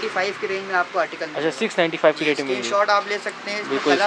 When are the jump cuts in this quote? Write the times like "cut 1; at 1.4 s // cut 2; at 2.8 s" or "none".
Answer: none